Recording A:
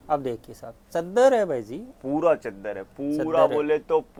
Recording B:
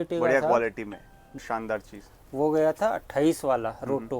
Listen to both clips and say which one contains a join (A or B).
B